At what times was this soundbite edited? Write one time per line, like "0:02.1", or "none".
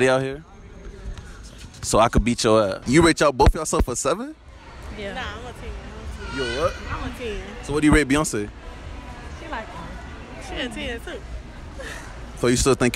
0:02.8